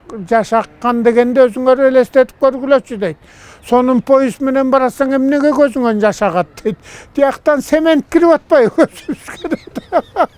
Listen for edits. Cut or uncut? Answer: uncut